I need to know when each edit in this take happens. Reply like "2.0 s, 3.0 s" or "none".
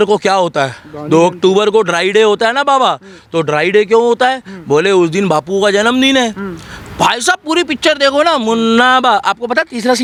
none

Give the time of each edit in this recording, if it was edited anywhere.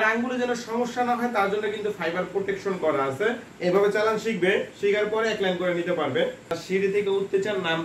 3.5 s, 6.6 s

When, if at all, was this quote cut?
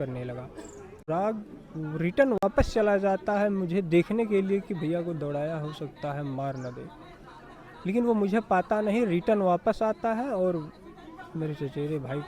1.0 s

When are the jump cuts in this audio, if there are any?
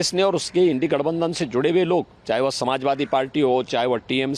2.2 s

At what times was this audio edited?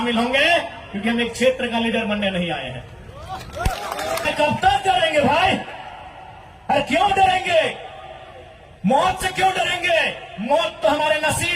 4.3 s

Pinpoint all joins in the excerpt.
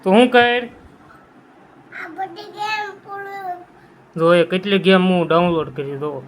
none

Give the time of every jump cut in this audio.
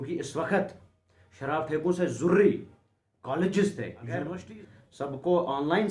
4.2 s

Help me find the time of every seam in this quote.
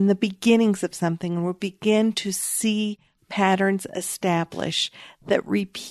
none

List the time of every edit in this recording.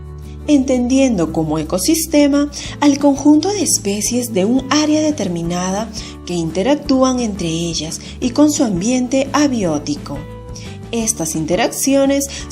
2.3 s

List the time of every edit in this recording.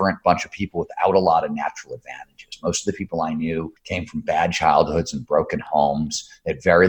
3.8 s

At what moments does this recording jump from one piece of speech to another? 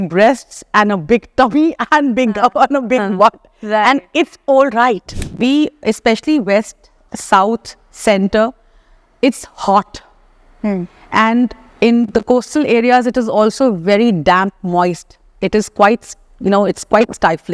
5.3 s

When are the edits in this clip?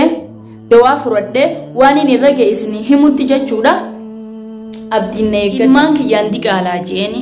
5.6 s

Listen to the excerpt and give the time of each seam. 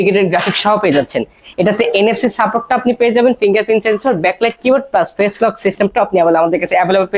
none

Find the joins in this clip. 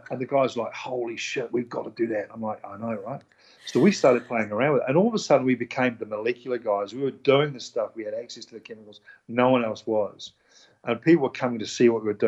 none

